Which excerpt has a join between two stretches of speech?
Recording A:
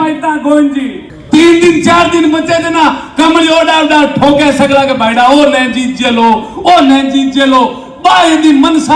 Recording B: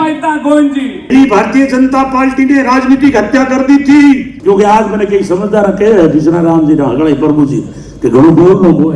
B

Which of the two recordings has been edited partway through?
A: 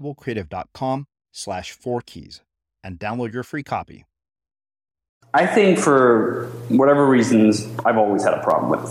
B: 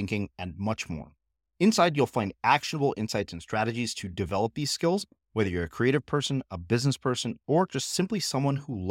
A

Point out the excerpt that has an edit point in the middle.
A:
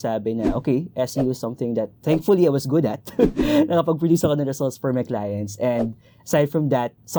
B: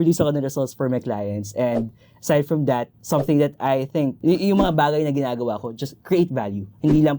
B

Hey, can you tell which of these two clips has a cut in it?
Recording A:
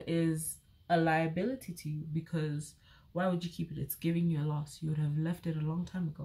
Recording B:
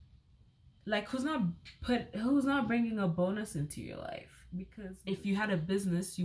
B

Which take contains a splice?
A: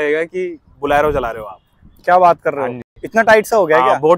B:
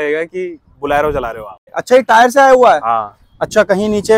B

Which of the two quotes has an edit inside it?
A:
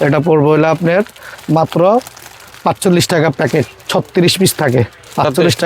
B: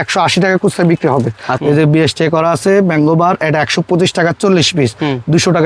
B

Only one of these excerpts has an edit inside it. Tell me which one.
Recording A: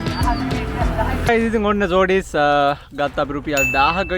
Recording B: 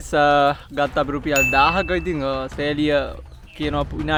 A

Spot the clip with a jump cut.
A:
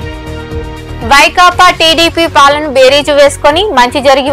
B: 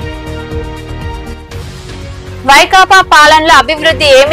B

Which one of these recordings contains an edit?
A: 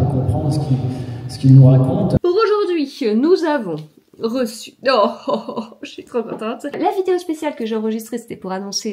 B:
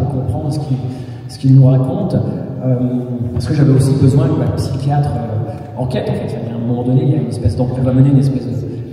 A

